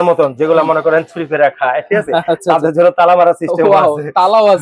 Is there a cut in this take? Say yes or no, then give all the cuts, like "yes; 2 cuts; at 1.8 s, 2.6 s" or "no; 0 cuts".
no; 0 cuts